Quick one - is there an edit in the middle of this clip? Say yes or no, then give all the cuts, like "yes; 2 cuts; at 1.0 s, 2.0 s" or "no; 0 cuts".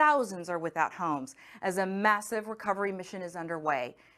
no; 0 cuts